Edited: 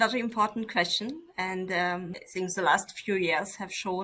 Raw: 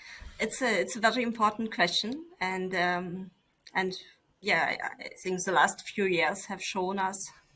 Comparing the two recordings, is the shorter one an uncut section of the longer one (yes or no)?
no